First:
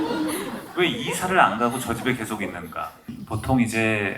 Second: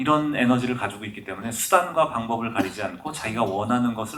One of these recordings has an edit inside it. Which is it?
first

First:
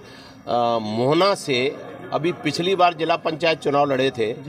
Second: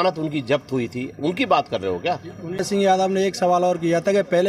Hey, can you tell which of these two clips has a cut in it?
second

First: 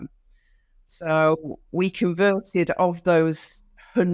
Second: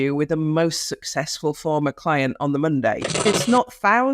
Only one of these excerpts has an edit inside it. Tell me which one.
second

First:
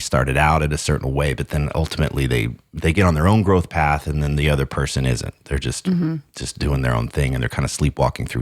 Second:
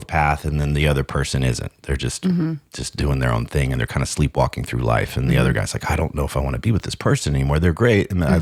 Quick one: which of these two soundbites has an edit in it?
first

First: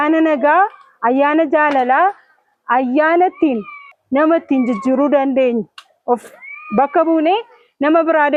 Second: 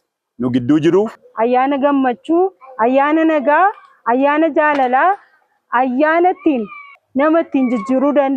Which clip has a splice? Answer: second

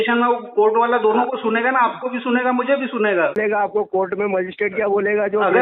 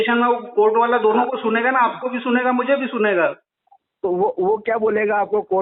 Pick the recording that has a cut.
first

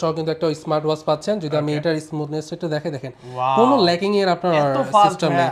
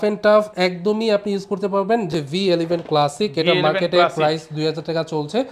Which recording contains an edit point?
second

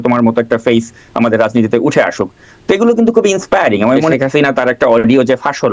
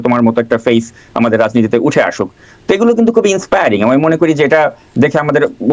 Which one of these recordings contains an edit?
first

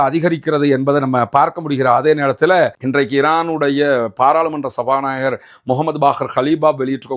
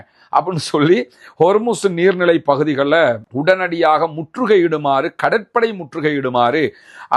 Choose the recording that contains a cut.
first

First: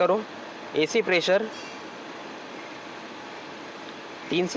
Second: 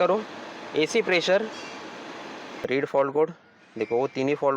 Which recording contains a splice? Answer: second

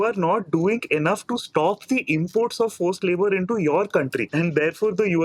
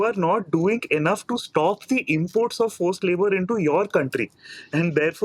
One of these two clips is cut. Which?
first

